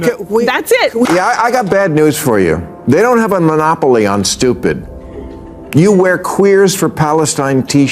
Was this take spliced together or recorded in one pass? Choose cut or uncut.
cut